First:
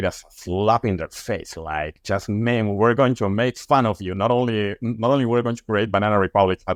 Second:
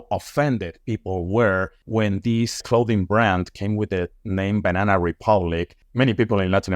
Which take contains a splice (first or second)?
second